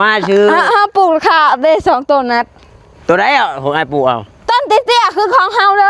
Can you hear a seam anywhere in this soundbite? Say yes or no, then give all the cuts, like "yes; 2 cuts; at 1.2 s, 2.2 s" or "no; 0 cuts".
no; 0 cuts